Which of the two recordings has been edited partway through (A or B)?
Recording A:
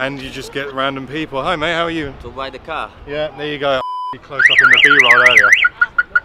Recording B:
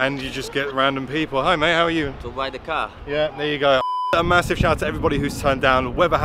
A